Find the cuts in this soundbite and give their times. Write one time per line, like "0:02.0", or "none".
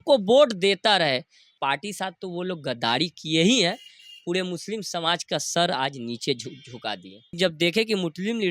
0:01.5
0:07.3